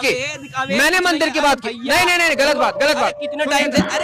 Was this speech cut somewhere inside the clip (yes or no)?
no